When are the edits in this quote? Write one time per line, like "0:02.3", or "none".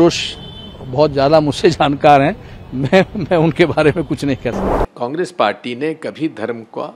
0:04.7